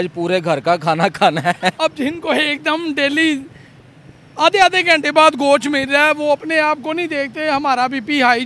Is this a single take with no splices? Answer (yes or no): no